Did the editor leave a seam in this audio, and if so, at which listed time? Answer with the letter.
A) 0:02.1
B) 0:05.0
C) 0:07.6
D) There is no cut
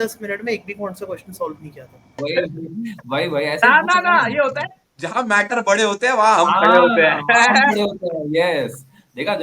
A